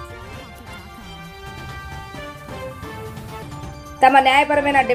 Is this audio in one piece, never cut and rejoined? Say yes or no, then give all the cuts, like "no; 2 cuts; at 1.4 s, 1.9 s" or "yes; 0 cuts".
yes; 0 cuts